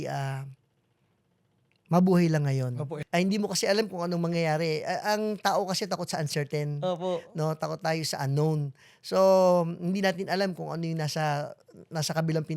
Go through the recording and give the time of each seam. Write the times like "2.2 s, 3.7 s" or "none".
2.9 s